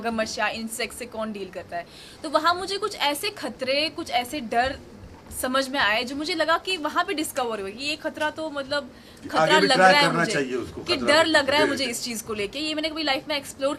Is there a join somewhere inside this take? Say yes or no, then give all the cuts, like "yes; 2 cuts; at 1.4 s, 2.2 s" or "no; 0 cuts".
no; 0 cuts